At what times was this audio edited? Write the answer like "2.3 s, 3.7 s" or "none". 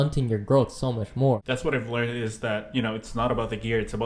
1.4 s